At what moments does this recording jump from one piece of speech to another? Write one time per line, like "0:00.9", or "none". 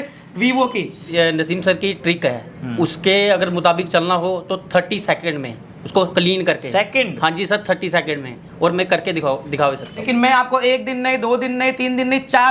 0:01.1
0:10.1